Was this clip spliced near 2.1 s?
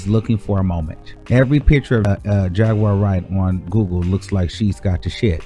yes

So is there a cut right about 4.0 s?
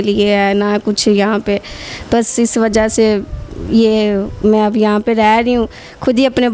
no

